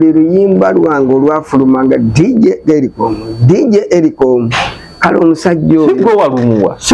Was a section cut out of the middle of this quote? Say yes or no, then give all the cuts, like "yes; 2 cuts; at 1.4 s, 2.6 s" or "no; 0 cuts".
no; 0 cuts